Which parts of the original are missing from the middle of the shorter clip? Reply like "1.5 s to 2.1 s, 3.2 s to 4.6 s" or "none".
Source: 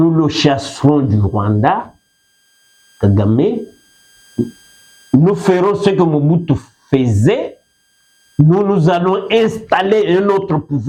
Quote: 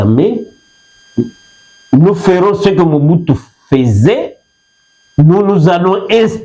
none